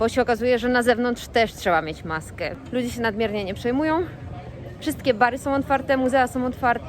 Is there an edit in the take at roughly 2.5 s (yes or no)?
yes